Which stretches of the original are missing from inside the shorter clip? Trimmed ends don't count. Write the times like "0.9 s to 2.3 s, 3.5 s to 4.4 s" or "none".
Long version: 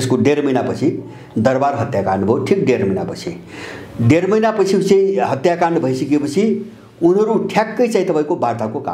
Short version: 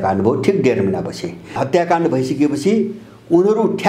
3.6 s to 5.3 s